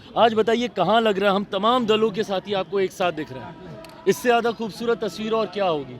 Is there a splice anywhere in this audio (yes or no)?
no